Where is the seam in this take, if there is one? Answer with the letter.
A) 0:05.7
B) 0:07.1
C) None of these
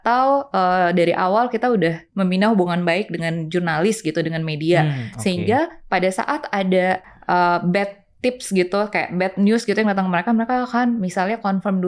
B